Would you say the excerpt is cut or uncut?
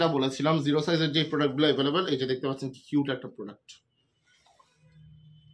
uncut